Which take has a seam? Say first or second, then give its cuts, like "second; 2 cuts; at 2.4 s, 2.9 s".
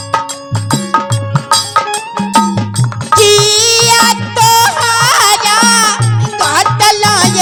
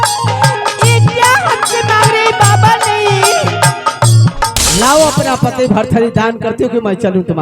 second; 1 cut; at 4.6 s